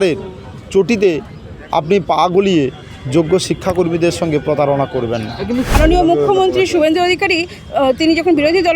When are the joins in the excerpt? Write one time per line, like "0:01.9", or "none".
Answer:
0:05.7